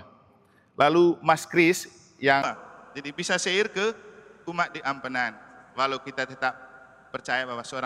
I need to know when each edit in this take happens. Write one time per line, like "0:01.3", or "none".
0:02.5